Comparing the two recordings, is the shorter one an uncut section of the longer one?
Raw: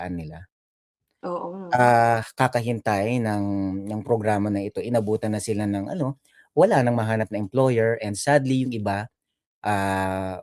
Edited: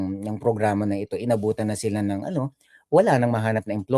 yes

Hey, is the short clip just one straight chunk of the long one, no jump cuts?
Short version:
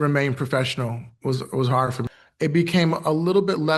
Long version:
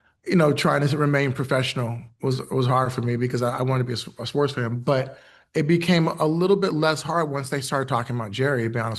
no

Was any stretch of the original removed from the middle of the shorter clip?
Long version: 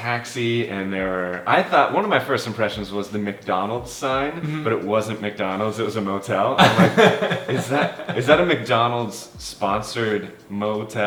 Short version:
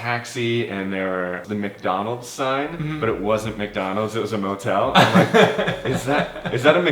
yes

